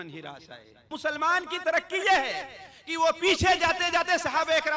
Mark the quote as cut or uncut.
cut